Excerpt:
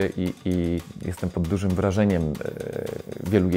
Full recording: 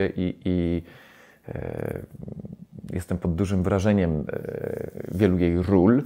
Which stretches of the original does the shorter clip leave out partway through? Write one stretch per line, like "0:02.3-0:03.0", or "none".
0:01.0-0:02.9